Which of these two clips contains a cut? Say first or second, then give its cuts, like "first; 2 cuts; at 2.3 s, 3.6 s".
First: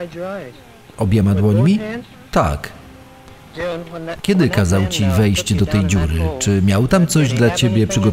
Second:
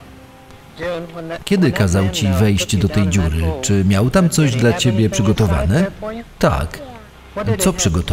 first; 1 cut; at 1.0 s